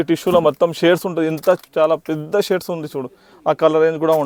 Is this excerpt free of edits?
yes; 0 cuts

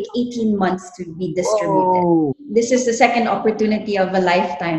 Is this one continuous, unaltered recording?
no; 1 cut; at 2.4 s

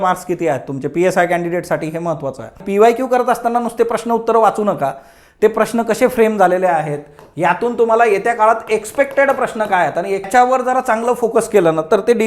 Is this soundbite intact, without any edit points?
no; 2 cuts; at 2.6 s, 10.3 s

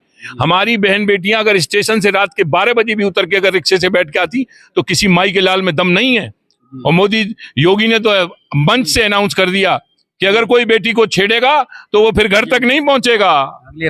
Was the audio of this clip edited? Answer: no; 0 cuts

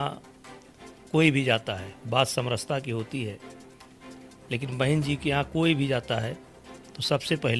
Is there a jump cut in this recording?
no; 0 cuts

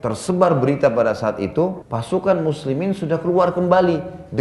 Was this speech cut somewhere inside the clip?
yes; 1 cut; at 1.9 s

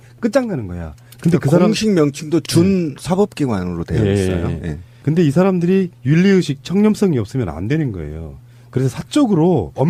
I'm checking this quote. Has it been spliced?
no; 0 cuts

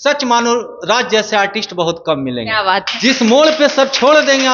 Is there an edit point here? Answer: no; 0 cuts

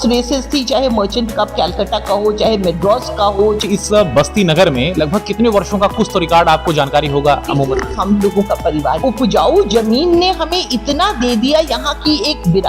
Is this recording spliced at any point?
yes; 2 cuts; at 3.6 s, 9.0 s

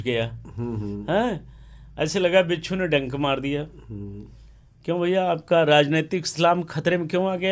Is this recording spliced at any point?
no; 0 cuts

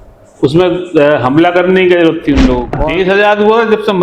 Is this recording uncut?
no; 1 cut; at 2.8 s

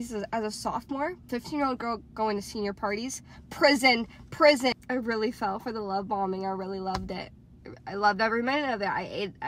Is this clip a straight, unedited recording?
no; 2 cuts; at 1.3 s, 4.8 s

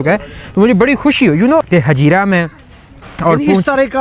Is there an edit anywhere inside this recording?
yes; 1 cut; at 1.7 s

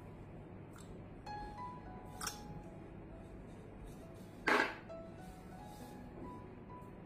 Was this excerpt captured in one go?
yes; 0 cuts

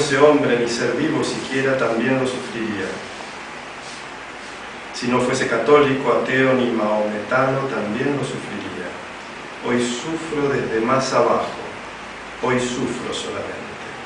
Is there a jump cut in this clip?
yes; 1 cut; at 8.3 s

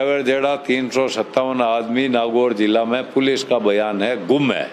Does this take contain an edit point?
no; 0 cuts

